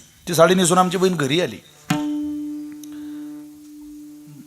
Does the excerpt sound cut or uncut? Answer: uncut